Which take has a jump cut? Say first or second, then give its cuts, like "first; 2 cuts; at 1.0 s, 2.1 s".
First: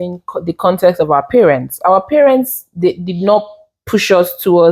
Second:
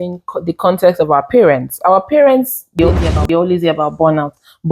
second; 1 cut; at 3.1 s